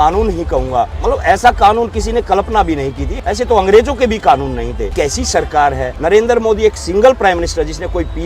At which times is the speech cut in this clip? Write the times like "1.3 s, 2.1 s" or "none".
0.9 s, 3.1 s, 4.8 s, 5.9 s

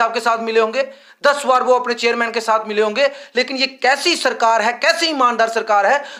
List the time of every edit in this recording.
none

